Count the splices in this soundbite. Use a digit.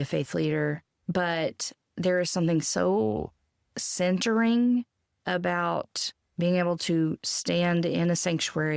1